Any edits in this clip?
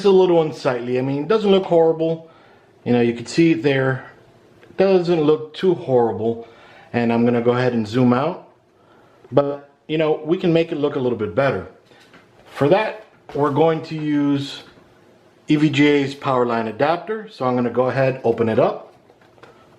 no; 0 cuts

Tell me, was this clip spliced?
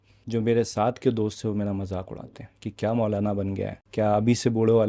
yes; 1 cut; at 3.8 s

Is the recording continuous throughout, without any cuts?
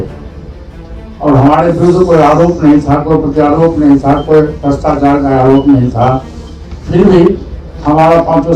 yes; 0 cuts

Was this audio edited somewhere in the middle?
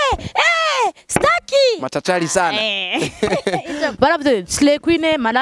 yes; 1 cut; at 3.9 s

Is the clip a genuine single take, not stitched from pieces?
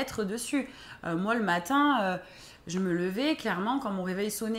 yes; 0 cuts

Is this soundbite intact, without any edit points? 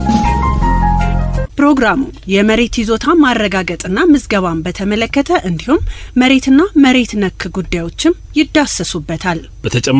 no; 1 cut; at 1.2 s

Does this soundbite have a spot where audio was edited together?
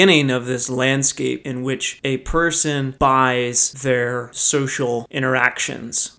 yes; 2 cuts; at 1.4 s, 3.7 s

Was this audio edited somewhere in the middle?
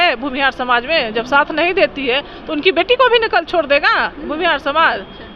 no; 0 cuts

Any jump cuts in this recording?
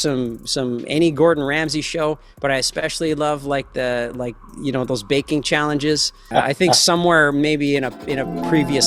yes; 1 cut; at 6.2 s

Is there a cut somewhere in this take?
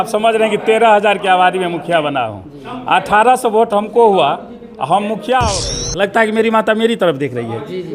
yes; 1 cut; at 5.8 s

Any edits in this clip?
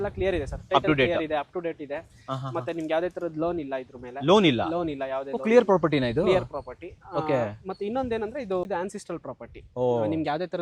yes; 1 cut; at 8.6 s

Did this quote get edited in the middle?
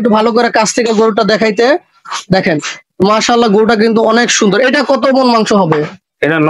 no; 0 cuts

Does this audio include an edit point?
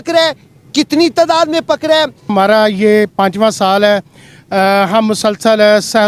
yes; 1 cut; at 2.3 s

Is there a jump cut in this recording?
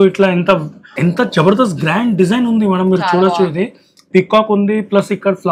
yes; 1 cut; at 0.9 s

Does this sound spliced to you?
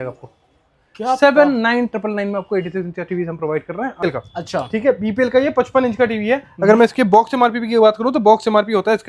yes; 1 cut; at 4.0 s

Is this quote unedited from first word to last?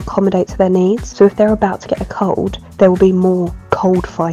no; 2 cuts; at 1.1 s, 2.6 s

